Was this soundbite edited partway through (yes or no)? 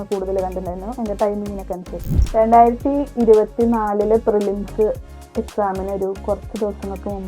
yes